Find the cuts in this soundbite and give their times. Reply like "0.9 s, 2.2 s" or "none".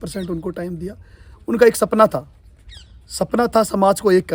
none